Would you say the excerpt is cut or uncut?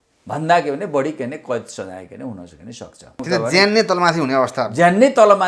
cut